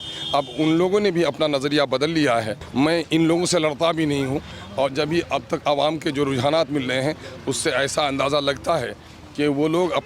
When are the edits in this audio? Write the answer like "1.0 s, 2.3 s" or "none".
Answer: 2.6 s